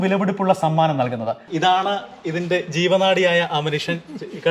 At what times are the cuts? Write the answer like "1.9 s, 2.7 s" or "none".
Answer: 1.4 s